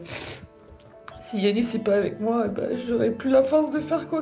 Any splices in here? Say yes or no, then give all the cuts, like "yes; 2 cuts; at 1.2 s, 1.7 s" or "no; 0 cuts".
no; 0 cuts